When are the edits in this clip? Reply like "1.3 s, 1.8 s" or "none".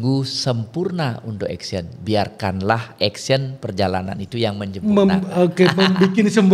none